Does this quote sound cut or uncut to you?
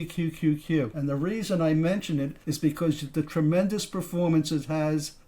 cut